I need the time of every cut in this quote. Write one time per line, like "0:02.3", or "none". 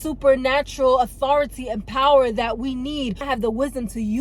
0:03.2